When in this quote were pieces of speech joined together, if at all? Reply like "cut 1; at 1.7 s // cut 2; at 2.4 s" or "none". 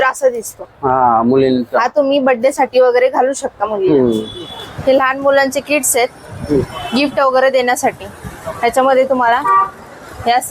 cut 1; at 4.6 s